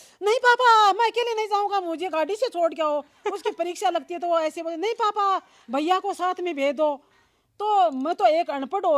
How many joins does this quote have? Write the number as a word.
zero